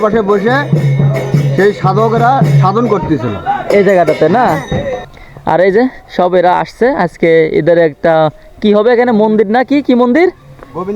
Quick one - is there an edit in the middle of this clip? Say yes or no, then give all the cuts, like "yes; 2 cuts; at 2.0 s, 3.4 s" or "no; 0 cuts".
yes; 1 cut; at 5.0 s